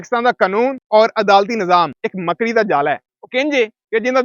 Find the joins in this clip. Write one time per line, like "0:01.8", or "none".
none